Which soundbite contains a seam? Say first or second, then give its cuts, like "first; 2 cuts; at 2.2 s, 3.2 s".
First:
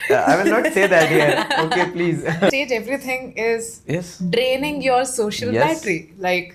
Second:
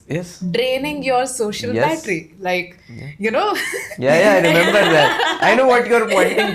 first; 1 cut; at 2.5 s